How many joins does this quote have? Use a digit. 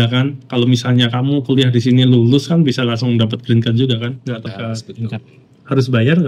1